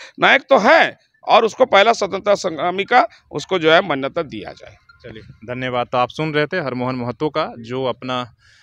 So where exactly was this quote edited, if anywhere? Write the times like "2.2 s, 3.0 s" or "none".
none